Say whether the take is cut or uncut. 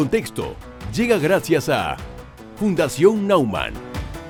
uncut